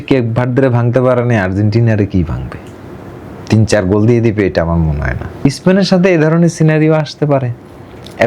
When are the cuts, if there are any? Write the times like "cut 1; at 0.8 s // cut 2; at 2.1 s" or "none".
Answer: cut 1; at 5.4 s